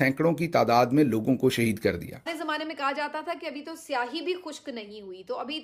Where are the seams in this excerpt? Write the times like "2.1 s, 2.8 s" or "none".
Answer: 2.3 s